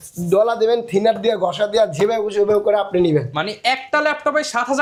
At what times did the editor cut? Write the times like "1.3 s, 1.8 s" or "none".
none